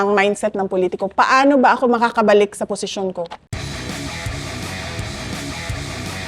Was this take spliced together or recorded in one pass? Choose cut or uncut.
cut